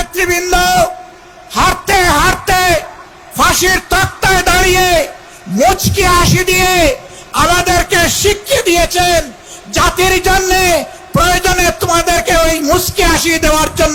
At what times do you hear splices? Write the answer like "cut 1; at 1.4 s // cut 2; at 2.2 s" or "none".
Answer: none